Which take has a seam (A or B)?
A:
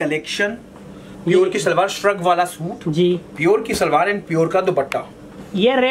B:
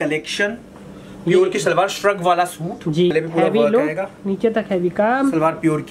B